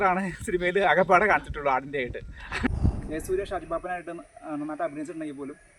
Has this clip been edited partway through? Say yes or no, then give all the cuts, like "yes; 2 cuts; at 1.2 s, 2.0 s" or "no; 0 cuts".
yes; 1 cut; at 2.9 s